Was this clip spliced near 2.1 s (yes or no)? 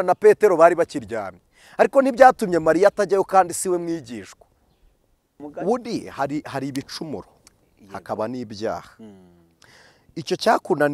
no